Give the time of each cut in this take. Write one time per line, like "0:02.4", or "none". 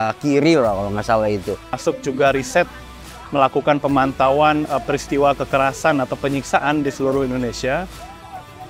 0:01.8